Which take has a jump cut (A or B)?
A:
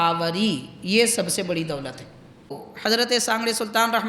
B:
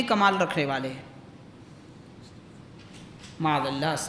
A